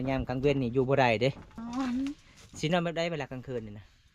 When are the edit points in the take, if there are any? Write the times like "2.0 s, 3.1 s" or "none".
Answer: 1.6 s